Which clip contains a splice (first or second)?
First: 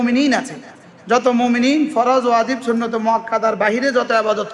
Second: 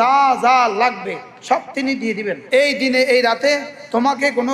second